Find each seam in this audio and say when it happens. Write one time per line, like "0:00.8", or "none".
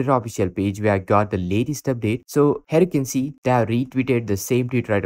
none

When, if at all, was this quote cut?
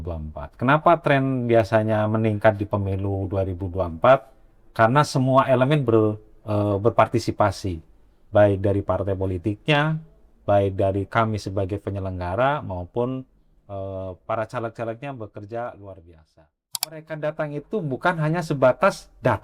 0:17.0

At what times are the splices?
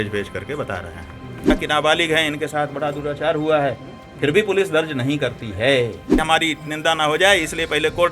0:01.5
0:06.2

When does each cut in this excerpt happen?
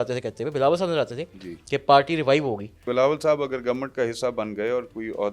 0:02.8

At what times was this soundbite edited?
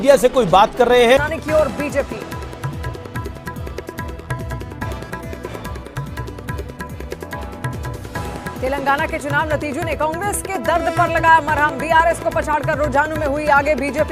none

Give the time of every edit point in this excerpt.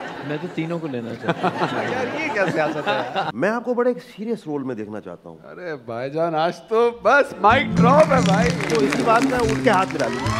0:03.3

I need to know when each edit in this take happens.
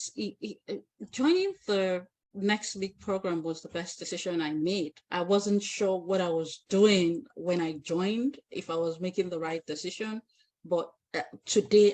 none

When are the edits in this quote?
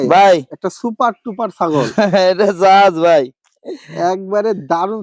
none

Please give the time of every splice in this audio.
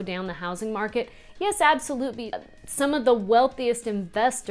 0:02.3

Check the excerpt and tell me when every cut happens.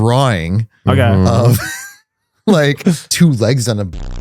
0:03.1

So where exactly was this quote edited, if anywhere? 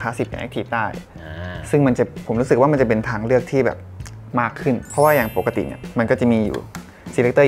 none

